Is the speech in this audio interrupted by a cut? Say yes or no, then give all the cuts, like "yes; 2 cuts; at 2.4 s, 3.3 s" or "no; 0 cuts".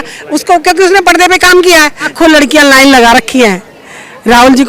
yes; 1 cut; at 2.1 s